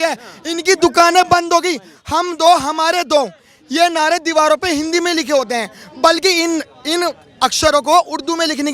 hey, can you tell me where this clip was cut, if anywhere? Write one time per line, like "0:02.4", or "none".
none